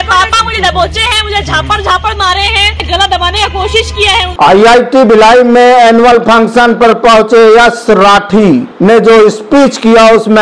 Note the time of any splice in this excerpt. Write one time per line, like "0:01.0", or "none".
0:02.8
0:04.3